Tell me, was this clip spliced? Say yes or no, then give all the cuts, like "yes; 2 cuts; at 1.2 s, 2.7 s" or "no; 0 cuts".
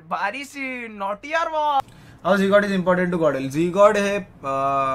yes; 1 cut; at 1.8 s